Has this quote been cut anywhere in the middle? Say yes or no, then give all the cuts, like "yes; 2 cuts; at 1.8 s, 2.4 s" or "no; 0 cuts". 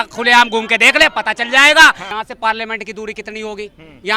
yes; 1 cut; at 2.1 s